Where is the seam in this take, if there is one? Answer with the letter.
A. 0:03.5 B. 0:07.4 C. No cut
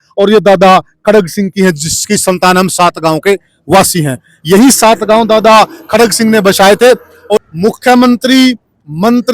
B